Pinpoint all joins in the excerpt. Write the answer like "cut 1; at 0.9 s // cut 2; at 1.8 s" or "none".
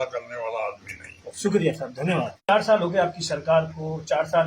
cut 1; at 2.5 s